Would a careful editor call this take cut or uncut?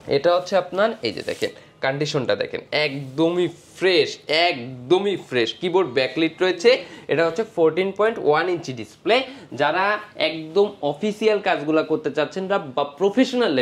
uncut